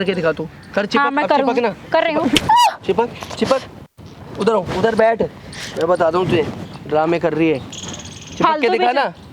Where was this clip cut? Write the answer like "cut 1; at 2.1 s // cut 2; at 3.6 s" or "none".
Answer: none